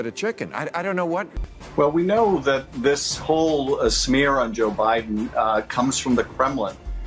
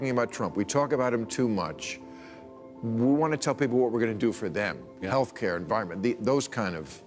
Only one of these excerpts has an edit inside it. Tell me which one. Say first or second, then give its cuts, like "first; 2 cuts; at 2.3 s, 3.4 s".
first; 1 cut; at 1.4 s